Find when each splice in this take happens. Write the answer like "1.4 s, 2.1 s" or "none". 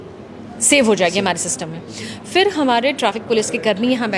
none